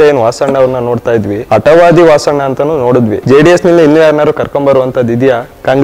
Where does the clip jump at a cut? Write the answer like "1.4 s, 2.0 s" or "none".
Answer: 1.4 s, 3.2 s